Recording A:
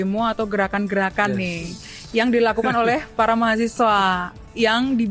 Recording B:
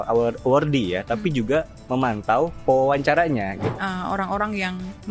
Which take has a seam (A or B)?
B